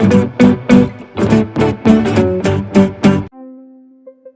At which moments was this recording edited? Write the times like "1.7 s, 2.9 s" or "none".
none